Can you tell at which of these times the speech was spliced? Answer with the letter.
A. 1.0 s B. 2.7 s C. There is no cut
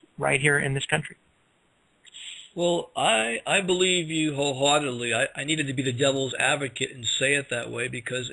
B